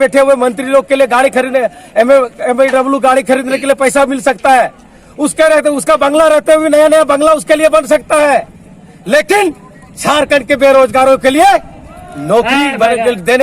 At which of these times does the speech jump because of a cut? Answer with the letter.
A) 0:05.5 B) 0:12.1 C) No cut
C